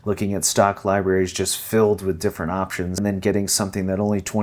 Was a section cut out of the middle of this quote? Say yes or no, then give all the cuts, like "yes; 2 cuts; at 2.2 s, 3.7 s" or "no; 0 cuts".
yes; 1 cut; at 2.9 s